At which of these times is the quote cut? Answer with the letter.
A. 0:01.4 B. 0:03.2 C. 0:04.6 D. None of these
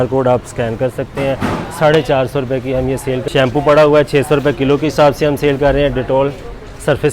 B